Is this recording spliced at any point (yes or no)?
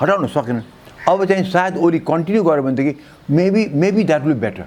no